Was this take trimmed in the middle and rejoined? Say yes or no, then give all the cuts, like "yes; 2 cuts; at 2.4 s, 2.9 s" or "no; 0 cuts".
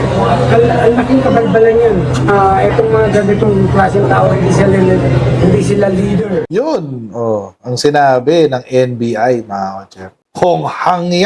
yes; 1 cut; at 6.4 s